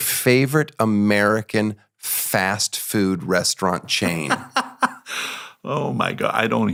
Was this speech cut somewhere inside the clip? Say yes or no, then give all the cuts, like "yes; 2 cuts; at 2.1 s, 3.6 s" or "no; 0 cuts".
no; 0 cuts